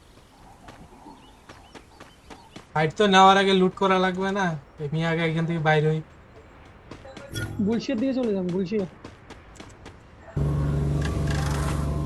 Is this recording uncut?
no; 1 cut; at 2.7 s

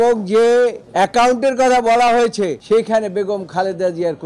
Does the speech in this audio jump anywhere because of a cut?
no; 0 cuts

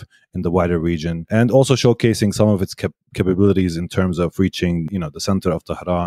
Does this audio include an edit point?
yes; 2 cuts; at 1.2 s, 4.8 s

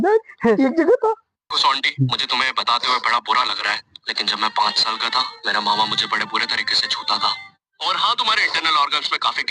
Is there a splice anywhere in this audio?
yes; 1 cut; at 1.5 s

